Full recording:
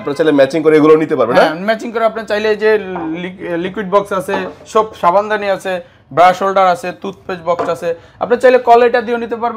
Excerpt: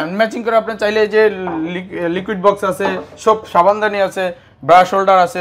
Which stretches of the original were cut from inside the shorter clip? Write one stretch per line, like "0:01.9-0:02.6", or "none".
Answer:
none